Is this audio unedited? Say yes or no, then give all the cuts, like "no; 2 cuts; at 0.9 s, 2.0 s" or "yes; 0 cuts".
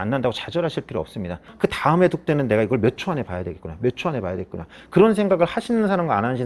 no; 1 cut; at 1.5 s